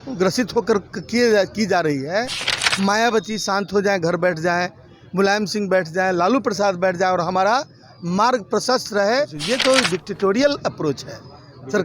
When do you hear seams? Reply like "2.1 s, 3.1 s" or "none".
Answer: 9.4 s